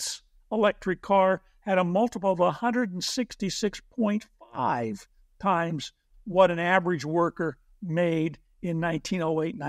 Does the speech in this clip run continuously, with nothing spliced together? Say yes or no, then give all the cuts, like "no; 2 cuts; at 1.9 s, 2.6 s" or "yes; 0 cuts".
yes; 0 cuts